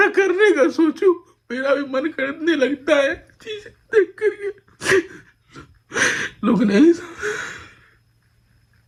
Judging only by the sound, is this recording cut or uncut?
uncut